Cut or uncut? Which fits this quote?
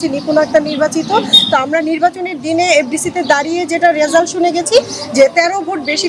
uncut